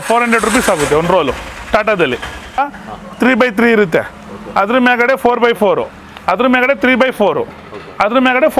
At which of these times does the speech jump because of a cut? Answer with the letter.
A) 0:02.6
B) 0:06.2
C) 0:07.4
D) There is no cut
A